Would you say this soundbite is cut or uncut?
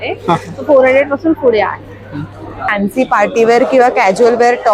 cut